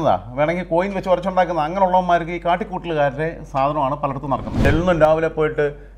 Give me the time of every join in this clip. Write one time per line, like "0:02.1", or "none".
0:04.6